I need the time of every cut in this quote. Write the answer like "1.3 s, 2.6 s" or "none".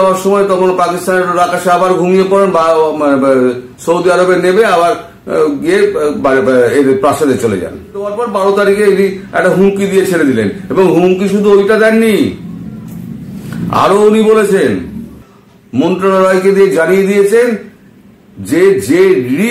8.2 s, 15.0 s